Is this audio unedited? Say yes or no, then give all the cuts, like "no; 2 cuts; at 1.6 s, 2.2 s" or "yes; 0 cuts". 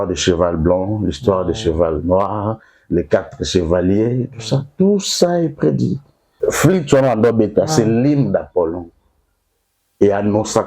no; 1 cut; at 6.2 s